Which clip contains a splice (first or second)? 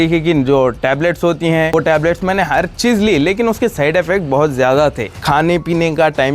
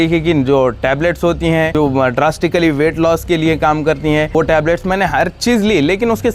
first